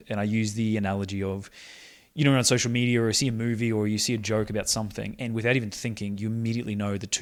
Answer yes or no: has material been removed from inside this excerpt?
no